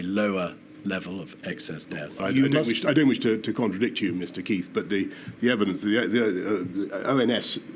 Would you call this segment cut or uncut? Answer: cut